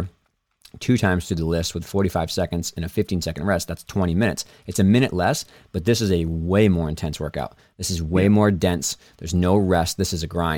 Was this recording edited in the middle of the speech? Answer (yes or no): no